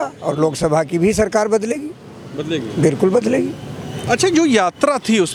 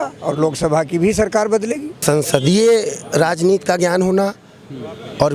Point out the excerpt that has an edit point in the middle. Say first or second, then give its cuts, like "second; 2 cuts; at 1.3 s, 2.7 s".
second; 1 cut; at 2.0 s